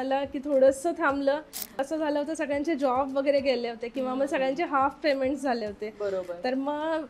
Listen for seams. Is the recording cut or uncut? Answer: cut